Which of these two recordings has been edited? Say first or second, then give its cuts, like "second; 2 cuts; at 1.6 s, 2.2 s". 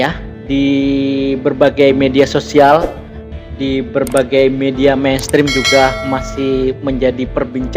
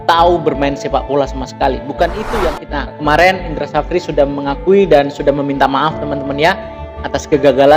second; 1 cut; at 2.6 s